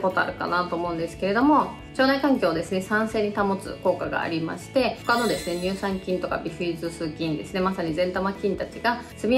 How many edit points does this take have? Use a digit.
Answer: 1